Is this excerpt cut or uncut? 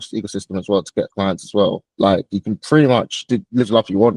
cut